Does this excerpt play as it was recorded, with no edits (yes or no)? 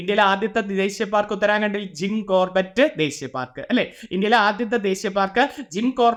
yes